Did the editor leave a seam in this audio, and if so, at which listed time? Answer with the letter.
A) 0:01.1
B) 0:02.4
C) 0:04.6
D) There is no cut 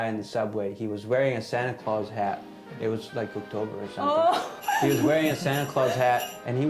C